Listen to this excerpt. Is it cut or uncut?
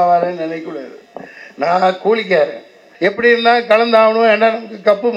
cut